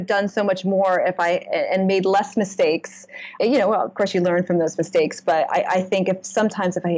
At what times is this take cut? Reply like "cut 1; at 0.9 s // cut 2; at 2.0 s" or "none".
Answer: cut 1; at 3.3 s